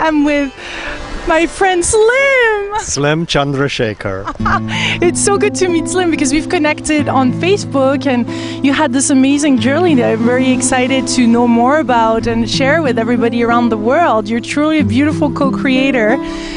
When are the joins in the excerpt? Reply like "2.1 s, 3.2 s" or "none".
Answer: 7.6 s